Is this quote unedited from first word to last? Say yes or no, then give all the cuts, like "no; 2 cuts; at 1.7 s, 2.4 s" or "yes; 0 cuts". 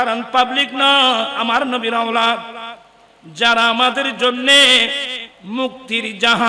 no; 1 cut; at 1.4 s